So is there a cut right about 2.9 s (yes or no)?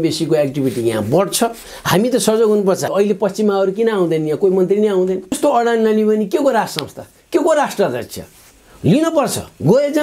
yes